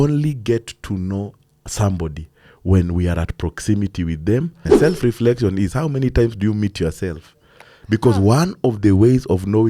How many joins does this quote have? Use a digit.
1